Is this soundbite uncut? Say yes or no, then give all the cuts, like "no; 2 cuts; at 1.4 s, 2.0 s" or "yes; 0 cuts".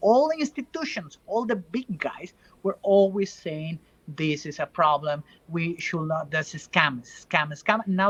yes; 0 cuts